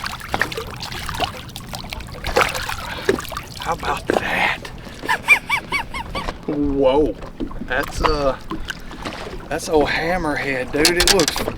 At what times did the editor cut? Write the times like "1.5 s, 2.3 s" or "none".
6.4 s

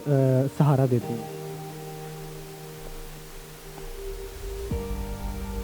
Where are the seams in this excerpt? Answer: 1.2 s

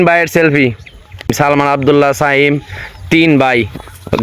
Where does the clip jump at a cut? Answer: 1.3 s

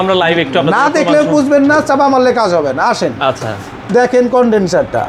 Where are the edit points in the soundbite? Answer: none

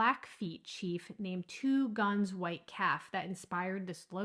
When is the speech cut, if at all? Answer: none

